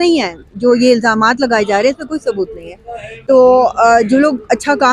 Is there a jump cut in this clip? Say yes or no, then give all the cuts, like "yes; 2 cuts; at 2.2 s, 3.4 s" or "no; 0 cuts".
no; 0 cuts